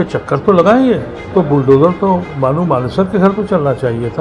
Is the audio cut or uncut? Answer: cut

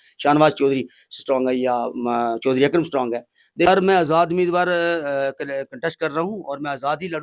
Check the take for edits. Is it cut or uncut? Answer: cut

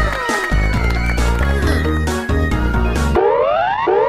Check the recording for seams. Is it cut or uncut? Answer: cut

